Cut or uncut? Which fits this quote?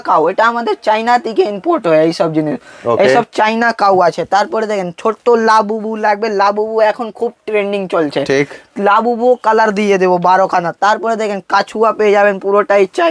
uncut